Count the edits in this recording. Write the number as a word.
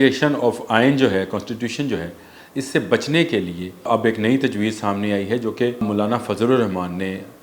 two